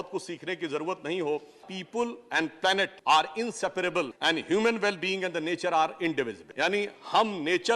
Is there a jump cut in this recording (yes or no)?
yes